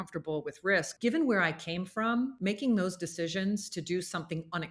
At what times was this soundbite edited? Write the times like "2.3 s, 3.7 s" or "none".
0.9 s, 2.3 s